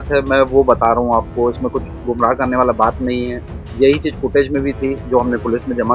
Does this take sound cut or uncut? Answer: uncut